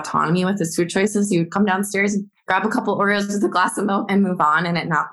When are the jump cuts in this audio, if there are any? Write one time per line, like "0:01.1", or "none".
0:02.4